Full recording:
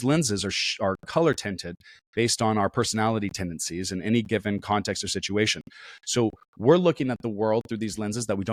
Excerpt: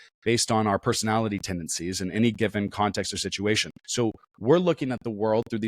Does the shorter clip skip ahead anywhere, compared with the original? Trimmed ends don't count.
yes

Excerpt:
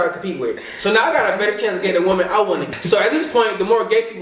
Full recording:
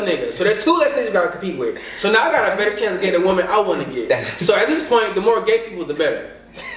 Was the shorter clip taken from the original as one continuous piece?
no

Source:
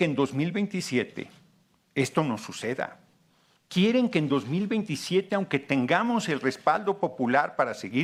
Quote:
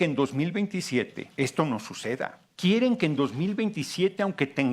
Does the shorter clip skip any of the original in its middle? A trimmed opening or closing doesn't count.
yes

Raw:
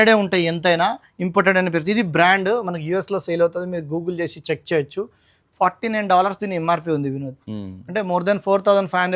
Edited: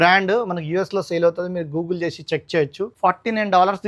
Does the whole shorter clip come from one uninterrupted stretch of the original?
no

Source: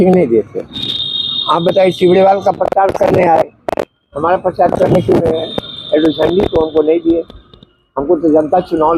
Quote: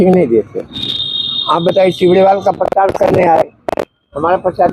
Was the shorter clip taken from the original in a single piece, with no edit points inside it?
yes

